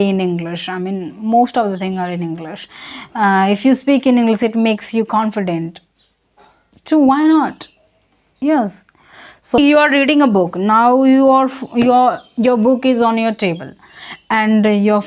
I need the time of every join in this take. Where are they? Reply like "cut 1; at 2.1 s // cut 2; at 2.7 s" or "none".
cut 1; at 9.6 s